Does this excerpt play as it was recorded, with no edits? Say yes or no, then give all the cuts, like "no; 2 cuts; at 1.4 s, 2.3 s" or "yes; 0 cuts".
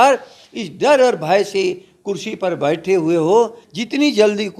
no; 1 cut; at 3.7 s